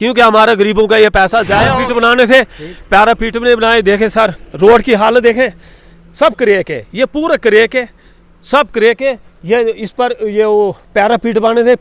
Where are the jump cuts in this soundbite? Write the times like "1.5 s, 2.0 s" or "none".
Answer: 1.7 s